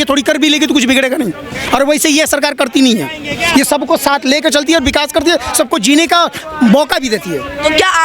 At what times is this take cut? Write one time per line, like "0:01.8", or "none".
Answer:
none

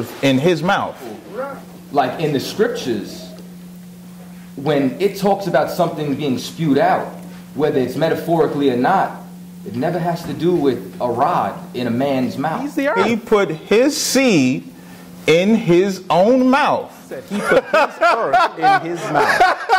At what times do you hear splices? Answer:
0:01.2
0:12.8
0:17.3

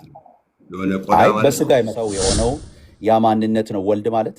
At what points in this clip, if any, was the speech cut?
0:02.0

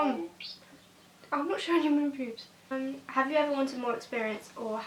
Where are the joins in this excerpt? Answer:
0:02.7

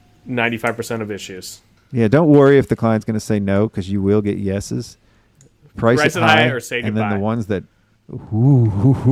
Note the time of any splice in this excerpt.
none

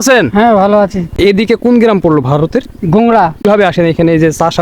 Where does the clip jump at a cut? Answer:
0:01.1
0:03.4

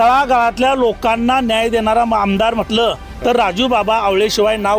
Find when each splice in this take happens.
none

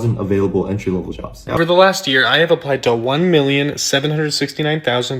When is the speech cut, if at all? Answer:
0:01.6

